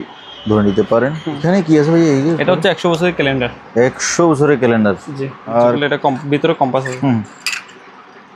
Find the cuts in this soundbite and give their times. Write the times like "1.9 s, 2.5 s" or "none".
1.4 s, 5.5 s